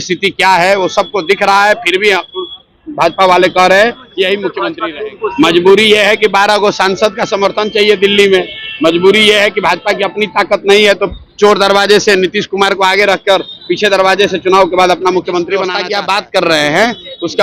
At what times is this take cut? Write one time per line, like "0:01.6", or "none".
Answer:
0:04.7
0:15.8